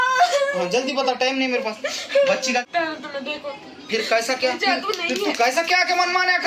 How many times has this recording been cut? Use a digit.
1